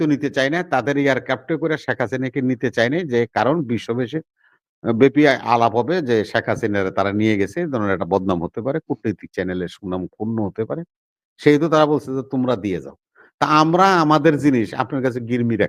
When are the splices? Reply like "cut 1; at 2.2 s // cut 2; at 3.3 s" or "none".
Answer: none

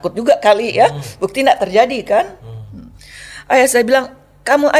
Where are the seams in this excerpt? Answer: none

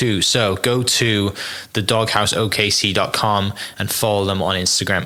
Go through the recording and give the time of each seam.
none

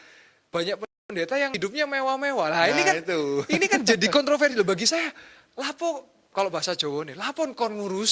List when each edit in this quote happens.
cut 1; at 1.6 s

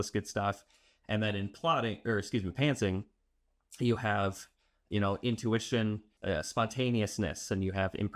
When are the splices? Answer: cut 1; at 6.1 s

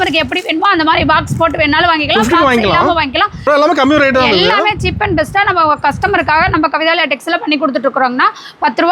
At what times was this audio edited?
cut 1; at 3.5 s

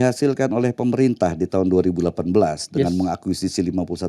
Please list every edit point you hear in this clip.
none

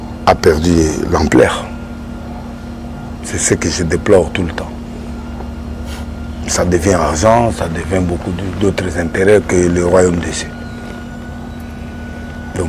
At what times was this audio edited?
none

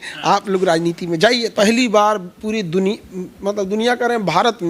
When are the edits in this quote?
cut 1; at 1.5 s

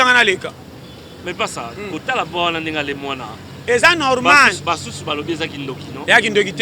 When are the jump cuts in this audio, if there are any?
cut 1; at 1.2 s

